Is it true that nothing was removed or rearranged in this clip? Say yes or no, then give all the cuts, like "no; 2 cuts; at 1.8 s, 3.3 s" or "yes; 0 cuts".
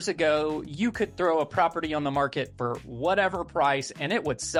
yes; 0 cuts